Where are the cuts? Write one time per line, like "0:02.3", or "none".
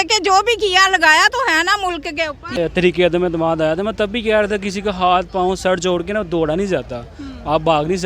0:02.4